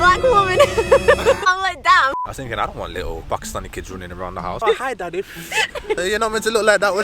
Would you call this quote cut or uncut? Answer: cut